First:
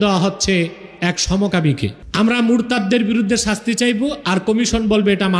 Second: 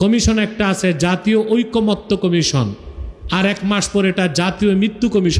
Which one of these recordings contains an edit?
first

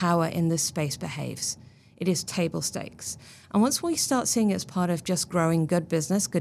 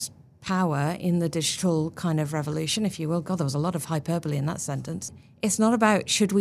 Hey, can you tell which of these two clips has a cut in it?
second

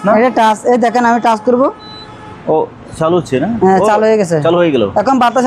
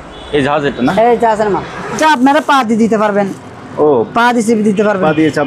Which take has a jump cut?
second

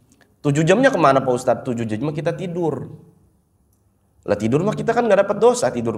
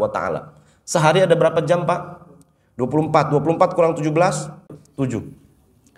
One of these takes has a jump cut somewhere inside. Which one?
second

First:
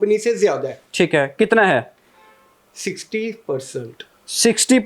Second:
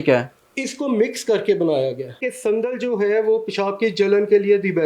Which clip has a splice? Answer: second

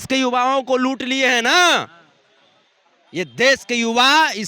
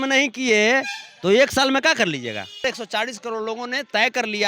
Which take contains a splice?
second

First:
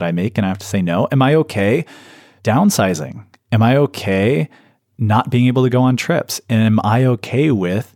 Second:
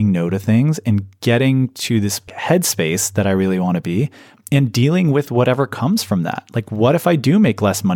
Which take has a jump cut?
second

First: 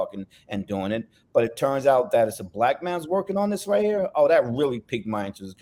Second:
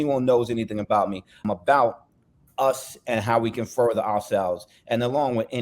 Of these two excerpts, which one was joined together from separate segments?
second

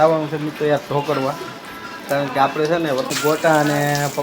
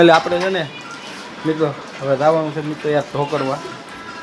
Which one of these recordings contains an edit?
first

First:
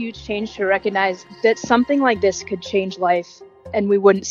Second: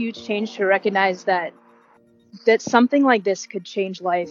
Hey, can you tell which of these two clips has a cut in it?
first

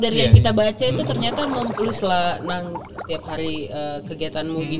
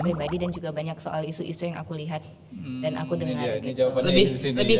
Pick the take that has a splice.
first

